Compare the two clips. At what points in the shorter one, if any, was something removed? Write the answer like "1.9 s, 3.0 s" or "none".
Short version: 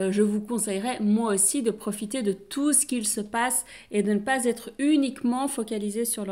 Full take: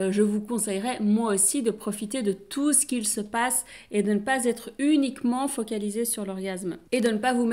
none